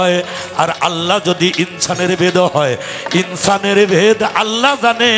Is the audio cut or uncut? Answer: uncut